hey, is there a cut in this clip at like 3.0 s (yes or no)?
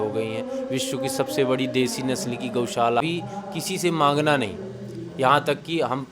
yes